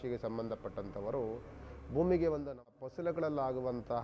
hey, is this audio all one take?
no; 1 cut; at 2.7 s

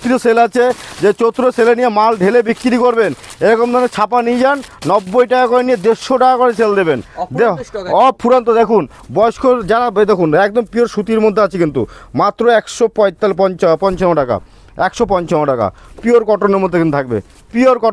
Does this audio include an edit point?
no; 0 cuts

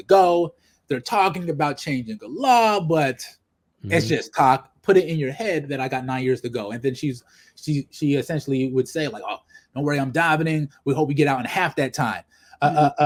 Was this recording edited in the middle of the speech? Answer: no; 0 cuts

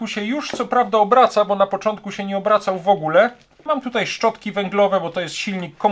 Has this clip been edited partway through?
yes; 1 cut; at 3.6 s

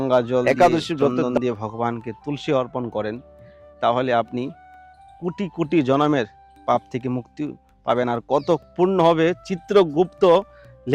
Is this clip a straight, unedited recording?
no; 1 cut; at 1.2 s

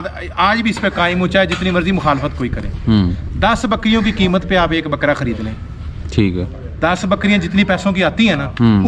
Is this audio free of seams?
yes; 0 cuts

